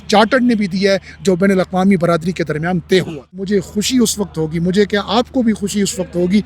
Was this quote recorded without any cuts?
no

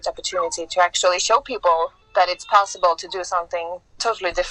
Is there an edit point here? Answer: no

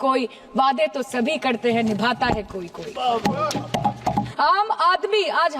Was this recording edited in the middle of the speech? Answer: yes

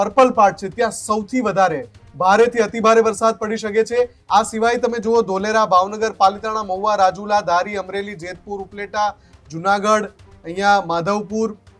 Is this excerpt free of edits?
no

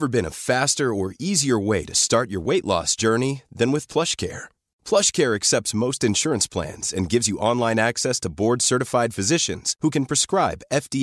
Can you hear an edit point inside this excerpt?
no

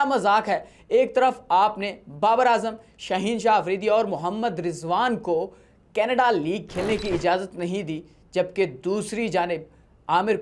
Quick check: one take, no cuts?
yes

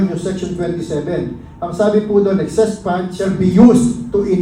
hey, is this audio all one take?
no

